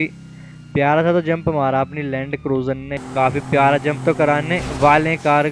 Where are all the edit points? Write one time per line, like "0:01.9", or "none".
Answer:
0:03.0